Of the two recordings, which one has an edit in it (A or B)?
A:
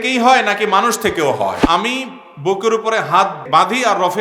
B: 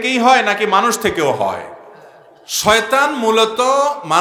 A